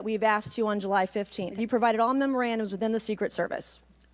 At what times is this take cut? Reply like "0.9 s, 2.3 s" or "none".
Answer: 1.6 s